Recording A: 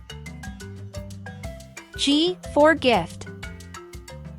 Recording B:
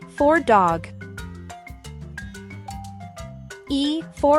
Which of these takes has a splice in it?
A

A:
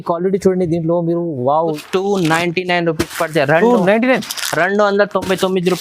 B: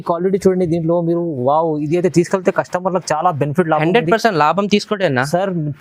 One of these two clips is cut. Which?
A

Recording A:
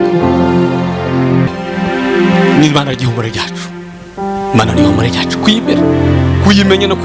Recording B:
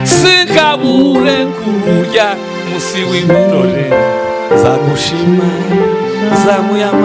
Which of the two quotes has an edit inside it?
A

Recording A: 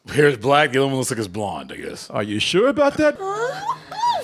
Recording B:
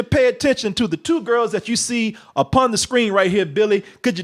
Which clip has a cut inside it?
A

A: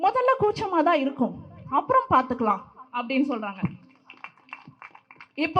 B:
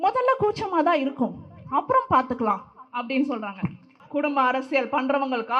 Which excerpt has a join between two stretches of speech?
B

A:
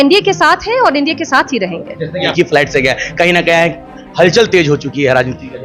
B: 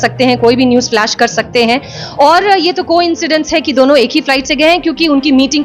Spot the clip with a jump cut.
A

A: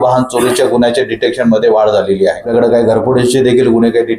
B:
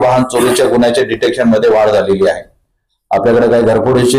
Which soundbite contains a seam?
A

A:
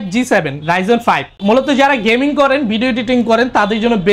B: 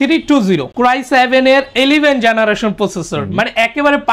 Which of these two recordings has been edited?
A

